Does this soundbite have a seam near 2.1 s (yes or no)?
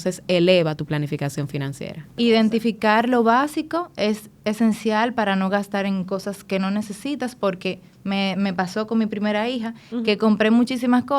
yes